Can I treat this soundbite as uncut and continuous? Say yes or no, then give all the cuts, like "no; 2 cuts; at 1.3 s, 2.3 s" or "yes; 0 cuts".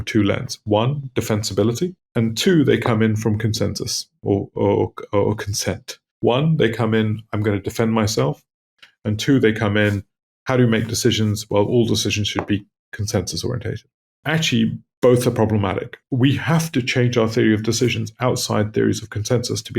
no; 1 cut; at 16.0 s